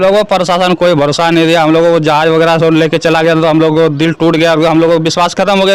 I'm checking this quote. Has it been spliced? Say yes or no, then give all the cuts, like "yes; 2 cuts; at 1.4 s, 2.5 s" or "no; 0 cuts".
no; 0 cuts